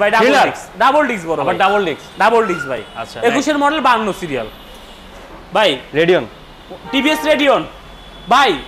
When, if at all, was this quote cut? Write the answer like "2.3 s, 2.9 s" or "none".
none